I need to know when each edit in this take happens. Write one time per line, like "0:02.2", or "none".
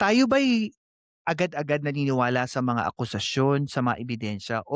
none